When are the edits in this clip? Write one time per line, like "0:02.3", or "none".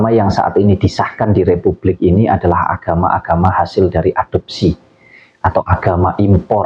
none